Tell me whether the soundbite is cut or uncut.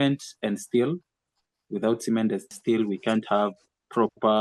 cut